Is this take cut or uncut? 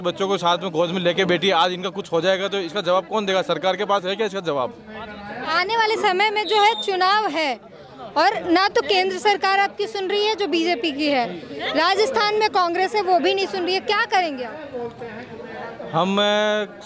uncut